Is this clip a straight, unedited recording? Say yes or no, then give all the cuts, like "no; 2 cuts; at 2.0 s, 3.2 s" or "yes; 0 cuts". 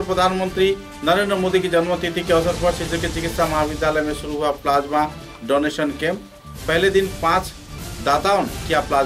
yes; 0 cuts